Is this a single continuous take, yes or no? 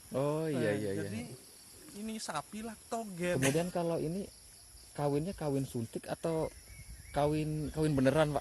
no